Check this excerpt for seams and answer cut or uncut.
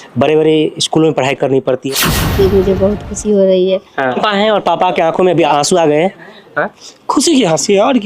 cut